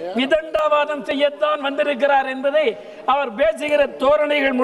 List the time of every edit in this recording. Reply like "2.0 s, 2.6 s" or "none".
none